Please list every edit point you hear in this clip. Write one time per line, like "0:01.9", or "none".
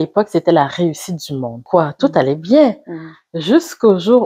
0:01.6